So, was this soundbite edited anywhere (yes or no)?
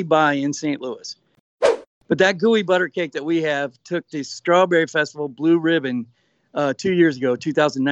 yes